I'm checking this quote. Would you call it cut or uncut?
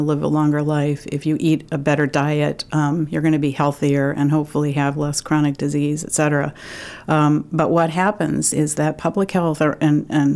uncut